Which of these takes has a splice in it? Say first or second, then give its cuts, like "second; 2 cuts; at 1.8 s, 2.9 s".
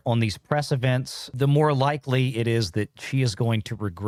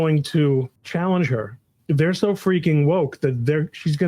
second; 1 cut; at 1.7 s